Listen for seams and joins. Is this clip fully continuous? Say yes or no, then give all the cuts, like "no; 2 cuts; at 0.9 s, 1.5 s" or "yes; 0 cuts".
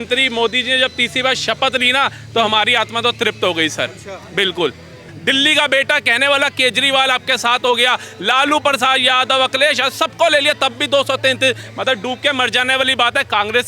no; 1 cut; at 5.0 s